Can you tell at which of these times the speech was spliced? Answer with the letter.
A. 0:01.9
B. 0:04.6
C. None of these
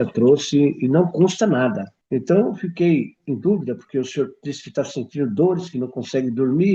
A